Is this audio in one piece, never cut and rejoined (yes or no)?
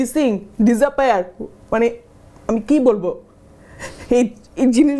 yes